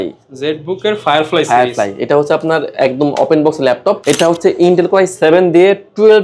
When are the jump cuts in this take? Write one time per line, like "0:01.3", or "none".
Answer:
none